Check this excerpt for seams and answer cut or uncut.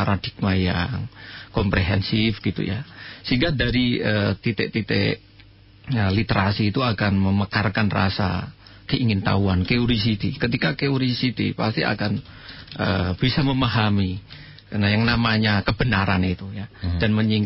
uncut